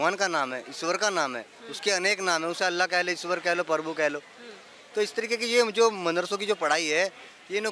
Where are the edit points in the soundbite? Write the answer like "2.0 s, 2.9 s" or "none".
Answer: none

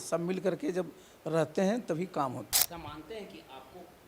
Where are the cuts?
2.5 s

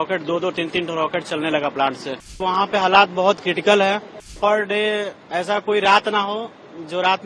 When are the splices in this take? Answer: 2.4 s, 4.3 s

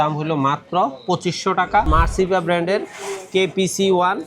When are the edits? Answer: 1.9 s

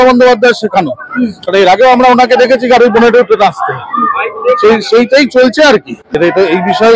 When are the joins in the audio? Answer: none

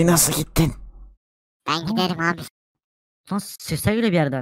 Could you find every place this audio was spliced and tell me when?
none

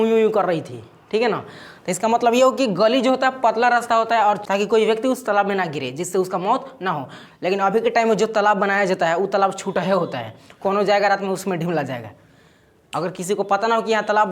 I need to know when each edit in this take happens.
4.4 s

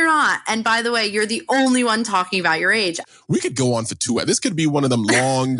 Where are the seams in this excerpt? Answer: 3.0 s

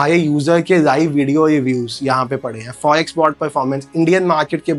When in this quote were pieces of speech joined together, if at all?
none

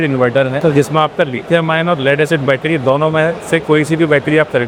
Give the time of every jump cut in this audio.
none

